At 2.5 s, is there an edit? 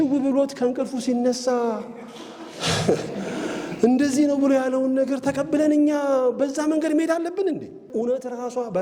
no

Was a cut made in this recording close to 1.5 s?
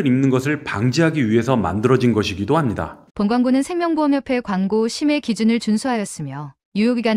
no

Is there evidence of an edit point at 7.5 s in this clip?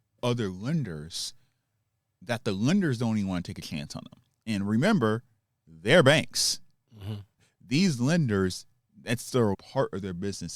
yes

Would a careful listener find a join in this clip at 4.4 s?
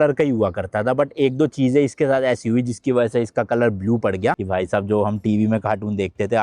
yes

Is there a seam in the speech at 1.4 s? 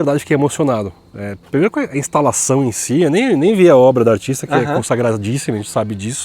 no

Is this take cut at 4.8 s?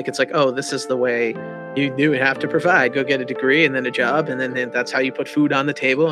no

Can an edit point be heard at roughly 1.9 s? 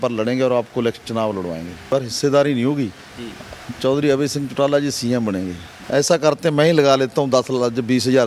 yes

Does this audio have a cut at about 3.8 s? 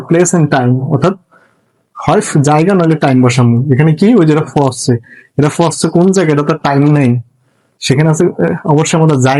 no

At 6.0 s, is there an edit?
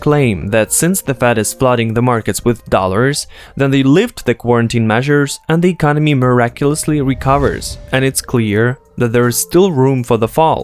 no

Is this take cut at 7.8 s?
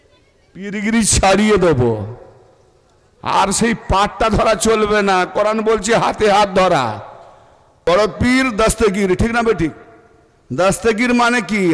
yes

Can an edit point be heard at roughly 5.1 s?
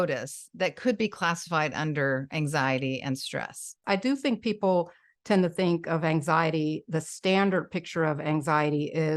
no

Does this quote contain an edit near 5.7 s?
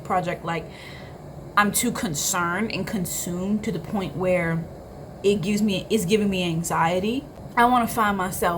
no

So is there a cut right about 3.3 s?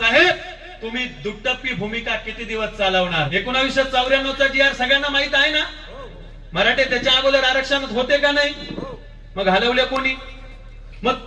yes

